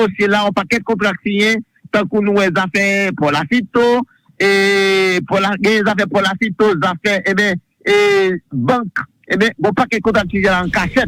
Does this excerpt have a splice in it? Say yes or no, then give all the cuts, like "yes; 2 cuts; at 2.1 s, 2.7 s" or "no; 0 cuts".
no; 0 cuts